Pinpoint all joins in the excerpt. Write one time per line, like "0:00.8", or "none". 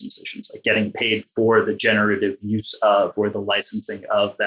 none